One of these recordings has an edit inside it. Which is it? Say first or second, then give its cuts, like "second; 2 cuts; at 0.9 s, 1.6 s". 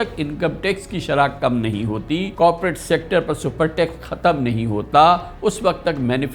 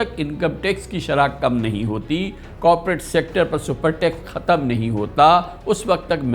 first; 1 cut; at 2.3 s